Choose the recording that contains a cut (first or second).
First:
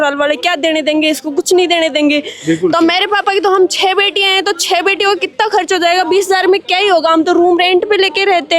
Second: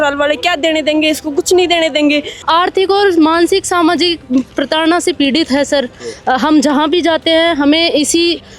second